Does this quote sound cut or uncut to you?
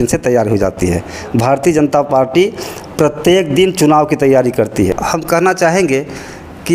cut